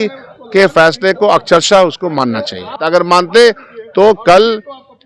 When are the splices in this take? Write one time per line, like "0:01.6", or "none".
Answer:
0:02.8